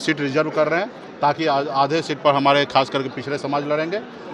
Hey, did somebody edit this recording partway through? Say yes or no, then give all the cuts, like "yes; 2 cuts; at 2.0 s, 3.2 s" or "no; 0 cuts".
no; 0 cuts